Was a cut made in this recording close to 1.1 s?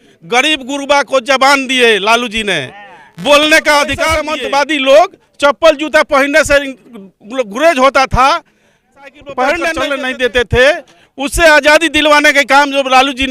no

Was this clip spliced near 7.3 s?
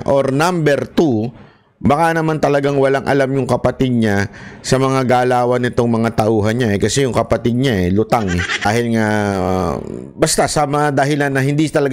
no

